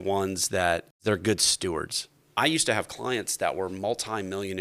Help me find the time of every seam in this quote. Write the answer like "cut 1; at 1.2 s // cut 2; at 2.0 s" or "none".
cut 1; at 0.9 s // cut 2; at 2.3 s

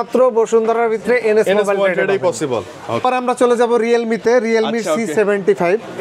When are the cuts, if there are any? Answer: none

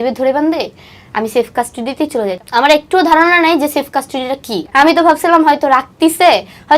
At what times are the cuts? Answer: cut 1; at 2.4 s

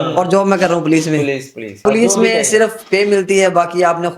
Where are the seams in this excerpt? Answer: cut 1; at 1.8 s

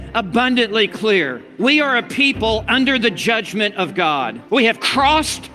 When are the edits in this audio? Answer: cut 1; at 4.4 s

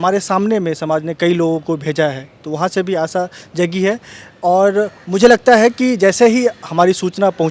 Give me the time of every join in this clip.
none

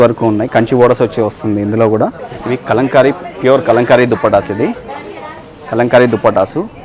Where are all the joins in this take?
cut 1; at 2.3 s

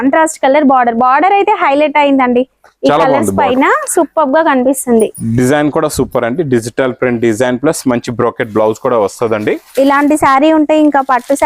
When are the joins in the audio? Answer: none

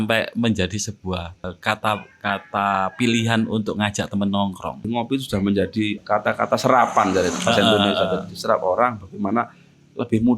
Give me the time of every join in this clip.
cut 1; at 1.5 s // cut 2; at 4.8 s // cut 3; at 6.0 s

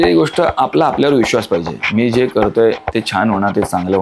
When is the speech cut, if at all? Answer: none

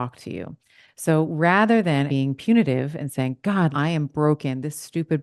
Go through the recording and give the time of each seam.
cut 1; at 2.1 s // cut 2; at 3.7 s

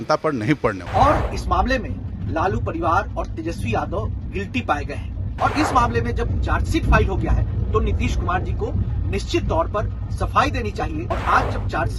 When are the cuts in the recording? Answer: cut 1; at 0.8 s // cut 2; at 5.2 s // cut 3; at 11.0 s

